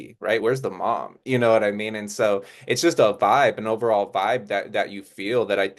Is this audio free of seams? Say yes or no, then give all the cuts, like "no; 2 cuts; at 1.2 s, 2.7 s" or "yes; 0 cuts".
yes; 0 cuts